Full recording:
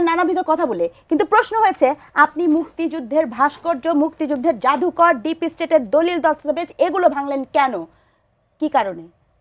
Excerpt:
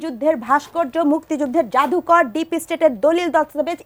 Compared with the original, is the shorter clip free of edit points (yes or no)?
yes